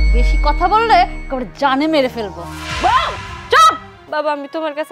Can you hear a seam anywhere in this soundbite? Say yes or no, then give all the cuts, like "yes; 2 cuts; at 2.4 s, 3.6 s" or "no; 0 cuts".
yes; 1 cut; at 3.9 s